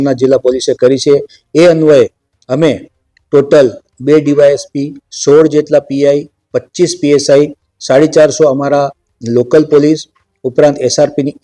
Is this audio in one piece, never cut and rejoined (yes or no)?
yes